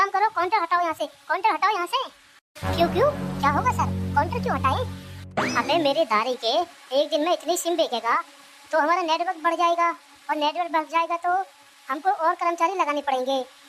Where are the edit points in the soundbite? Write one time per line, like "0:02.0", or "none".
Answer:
none